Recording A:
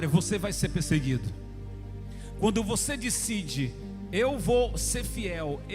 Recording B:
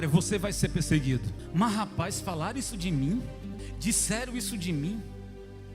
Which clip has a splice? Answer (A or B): B